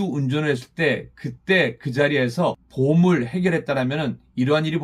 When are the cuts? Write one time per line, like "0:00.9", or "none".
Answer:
0:02.7